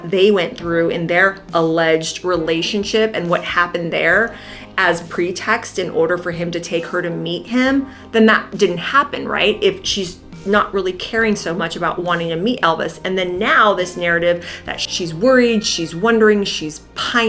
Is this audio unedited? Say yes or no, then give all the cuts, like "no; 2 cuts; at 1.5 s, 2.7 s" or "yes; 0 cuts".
yes; 0 cuts